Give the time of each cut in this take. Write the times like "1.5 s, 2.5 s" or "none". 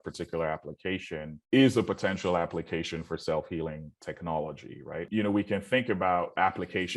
5.1 s